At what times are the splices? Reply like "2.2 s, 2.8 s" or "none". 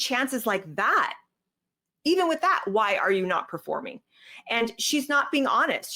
none